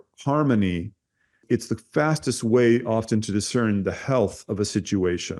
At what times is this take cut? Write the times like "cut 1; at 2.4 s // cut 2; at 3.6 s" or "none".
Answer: cut 1; at 1.4 s